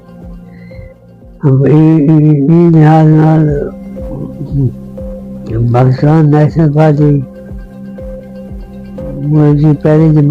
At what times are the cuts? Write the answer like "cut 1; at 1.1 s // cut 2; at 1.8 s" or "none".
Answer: cut 1; at 1.4 s // cut 2; at 7.2 s // cut 3; at 9.1 s